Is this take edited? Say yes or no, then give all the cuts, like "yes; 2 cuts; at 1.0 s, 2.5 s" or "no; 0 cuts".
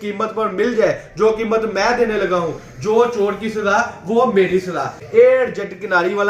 yes; 1 cut; at 5.0 s